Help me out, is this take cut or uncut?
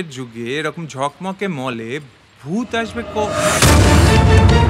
uncut